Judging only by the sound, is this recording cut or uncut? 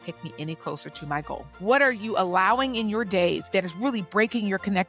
cut